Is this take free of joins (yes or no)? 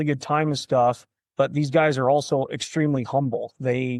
yes